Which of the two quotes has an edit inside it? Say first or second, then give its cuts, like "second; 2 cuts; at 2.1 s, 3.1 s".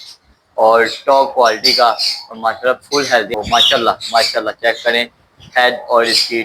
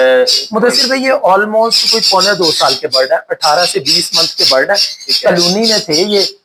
first; 1 cut; at 3.3 s